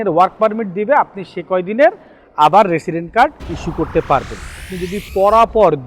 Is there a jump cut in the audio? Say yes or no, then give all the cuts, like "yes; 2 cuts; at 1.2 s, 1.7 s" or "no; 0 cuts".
yes; 1 cut; at 4.7 s